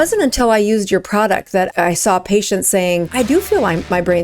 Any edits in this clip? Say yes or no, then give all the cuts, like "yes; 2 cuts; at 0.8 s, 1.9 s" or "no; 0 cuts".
yes; 2 cuts; at 1.7 s, 3.1 s